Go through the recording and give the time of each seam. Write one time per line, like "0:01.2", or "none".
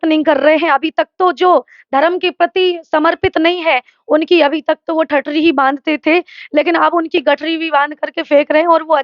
none